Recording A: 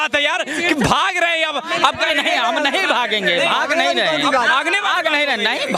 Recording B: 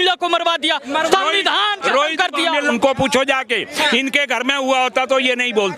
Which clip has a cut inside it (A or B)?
B